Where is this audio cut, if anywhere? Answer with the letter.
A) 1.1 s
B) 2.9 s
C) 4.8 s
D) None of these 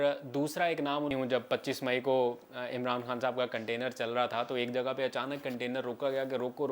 A